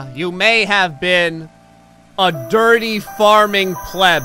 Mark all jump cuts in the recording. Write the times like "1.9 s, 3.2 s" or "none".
none

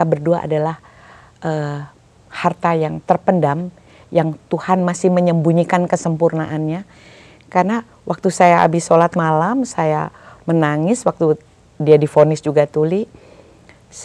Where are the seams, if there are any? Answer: none

